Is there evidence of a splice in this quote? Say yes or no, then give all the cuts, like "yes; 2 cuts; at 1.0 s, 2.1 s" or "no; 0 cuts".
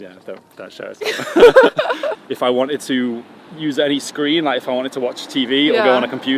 yes; 1 cut; at 2.2 s